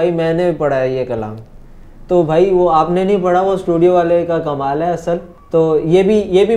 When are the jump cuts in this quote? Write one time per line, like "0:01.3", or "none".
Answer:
0:05.3